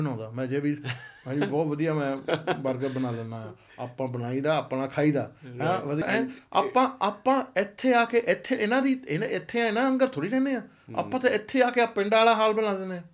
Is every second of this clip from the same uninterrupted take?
no; 1 cut; at 6.0 s

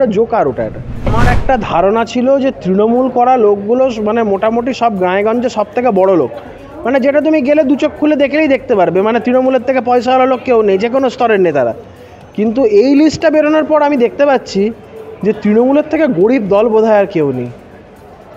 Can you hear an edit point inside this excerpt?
yes; 1 cut; at 1.1 s

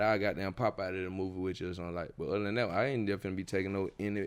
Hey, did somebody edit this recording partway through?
no; 0 cuts

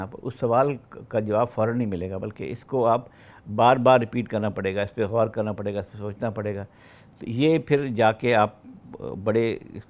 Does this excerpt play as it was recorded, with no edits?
yes; 0 cuts

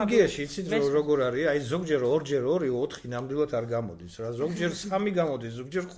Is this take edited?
no; 0 cuts

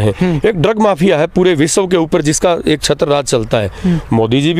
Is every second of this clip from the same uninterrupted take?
yes; 0 cuts

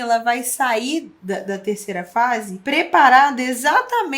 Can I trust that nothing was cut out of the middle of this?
no; 2 cuts; at 1.1 s, 2.5 s

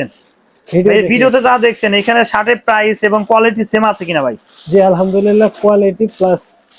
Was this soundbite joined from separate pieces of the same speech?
no; 0 cuts

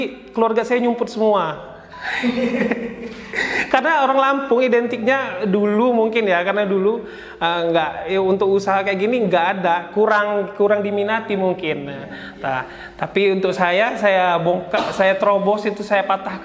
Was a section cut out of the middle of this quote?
no; 0 cuts

